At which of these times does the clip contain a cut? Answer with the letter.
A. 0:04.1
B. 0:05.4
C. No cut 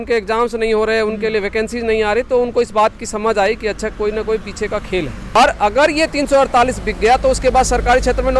B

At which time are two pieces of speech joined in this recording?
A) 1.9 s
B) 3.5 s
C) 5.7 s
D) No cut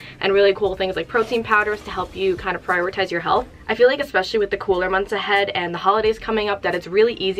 B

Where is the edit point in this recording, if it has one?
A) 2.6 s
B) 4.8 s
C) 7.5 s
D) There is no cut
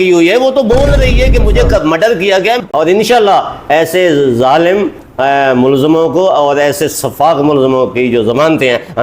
A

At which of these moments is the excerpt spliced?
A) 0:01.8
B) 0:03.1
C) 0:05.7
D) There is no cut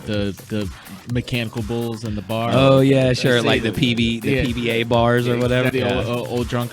C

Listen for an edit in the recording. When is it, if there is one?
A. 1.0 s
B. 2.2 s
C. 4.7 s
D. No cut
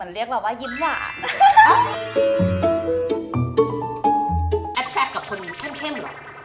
C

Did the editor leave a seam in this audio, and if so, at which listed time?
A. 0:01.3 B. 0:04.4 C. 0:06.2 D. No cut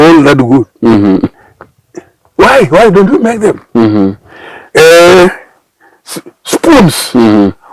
A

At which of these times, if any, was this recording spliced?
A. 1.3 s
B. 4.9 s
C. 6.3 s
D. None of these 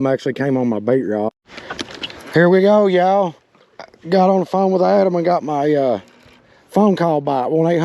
A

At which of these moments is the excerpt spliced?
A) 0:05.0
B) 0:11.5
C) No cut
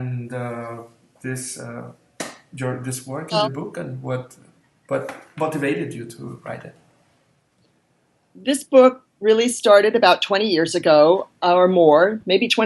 A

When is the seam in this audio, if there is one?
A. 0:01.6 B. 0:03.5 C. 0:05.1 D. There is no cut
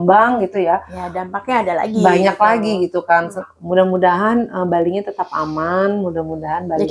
B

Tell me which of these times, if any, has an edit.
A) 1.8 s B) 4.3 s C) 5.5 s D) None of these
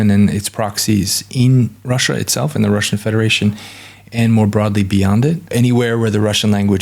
C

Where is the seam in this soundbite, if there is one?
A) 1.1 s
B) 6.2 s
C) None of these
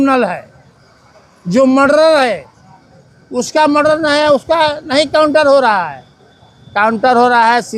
C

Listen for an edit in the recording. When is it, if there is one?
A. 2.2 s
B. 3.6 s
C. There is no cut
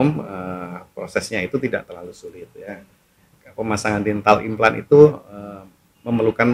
C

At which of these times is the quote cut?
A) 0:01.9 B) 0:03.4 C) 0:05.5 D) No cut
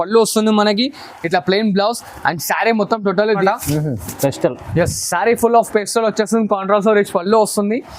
B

